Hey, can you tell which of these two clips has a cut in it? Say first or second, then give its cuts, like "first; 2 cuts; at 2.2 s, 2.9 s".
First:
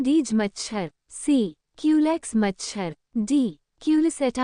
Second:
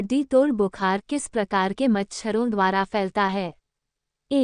first; 1 cut; at 1.1 s